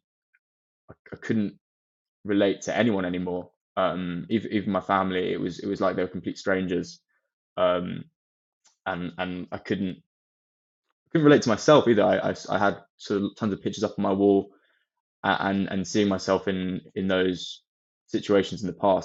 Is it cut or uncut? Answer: uncut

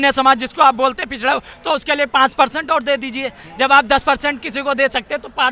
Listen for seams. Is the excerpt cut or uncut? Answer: uncut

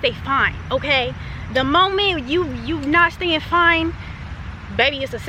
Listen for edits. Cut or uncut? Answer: uncut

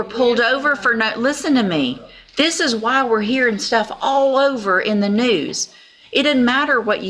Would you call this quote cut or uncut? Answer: uncut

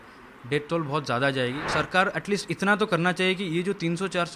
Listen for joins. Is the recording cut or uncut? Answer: cut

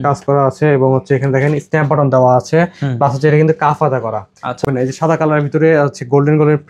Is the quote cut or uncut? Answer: cut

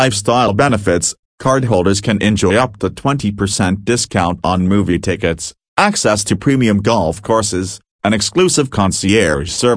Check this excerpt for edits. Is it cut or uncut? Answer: cut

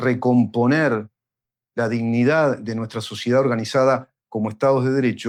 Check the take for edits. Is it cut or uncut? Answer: uncut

